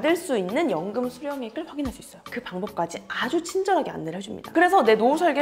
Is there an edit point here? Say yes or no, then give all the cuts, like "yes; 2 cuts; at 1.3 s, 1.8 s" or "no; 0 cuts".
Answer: yes; 1 cut; at 2.3 s